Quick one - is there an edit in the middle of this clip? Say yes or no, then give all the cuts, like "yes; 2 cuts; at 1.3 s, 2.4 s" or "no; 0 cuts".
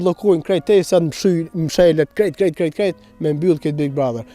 no; 0 cuts